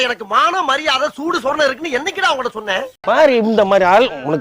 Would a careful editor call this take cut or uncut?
cut